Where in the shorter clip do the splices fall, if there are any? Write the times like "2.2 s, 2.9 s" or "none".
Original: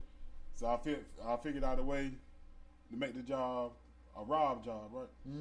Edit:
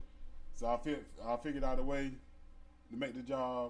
none